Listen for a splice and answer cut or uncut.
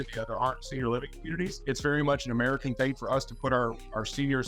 cut